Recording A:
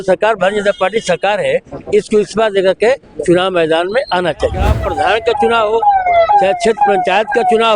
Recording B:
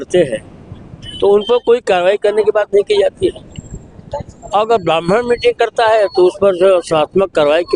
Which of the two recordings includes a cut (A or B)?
A